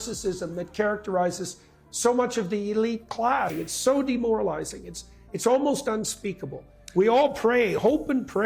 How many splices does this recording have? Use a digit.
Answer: 0